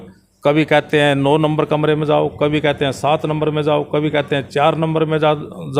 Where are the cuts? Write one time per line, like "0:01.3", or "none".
none